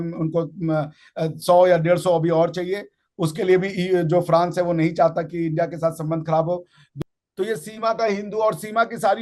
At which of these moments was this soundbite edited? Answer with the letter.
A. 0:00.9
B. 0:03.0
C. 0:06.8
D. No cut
C